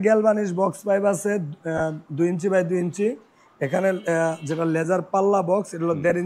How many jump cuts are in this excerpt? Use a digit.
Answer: 0